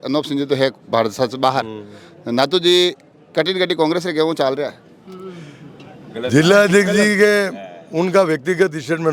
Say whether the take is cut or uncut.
uncut